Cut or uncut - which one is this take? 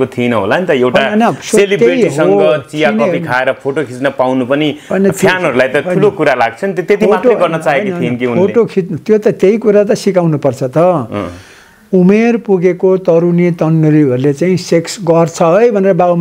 uncut